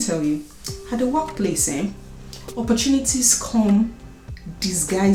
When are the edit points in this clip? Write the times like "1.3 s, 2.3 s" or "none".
none